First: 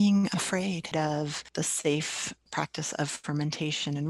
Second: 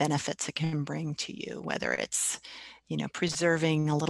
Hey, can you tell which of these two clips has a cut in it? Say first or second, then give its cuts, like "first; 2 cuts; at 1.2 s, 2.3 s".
first; 1 cut; at 0.9 s